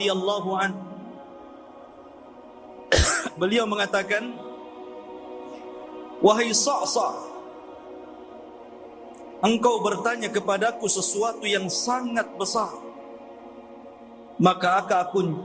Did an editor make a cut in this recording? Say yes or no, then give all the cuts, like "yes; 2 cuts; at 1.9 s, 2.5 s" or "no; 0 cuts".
yes; 8 cuts; at 1.3 s, 2.8 s, 4.6 s, 6.2 s, 7.3 s, 9.4 s, 12.9 s, 14.4 s